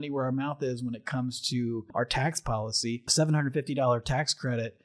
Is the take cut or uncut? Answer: cut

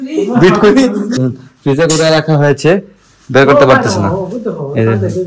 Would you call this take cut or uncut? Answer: cut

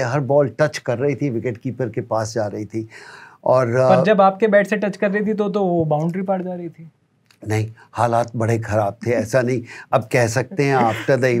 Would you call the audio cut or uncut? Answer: uncut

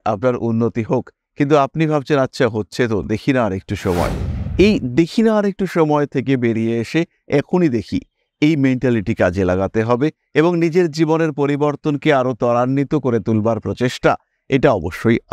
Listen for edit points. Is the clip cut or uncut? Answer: uncut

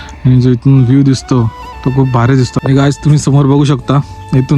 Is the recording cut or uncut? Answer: cut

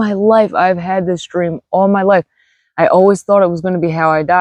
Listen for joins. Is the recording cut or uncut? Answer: uncut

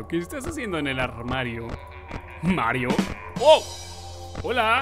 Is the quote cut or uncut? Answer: uncut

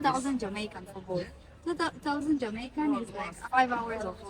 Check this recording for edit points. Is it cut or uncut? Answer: cut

